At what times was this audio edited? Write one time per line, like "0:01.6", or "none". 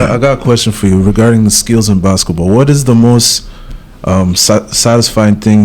none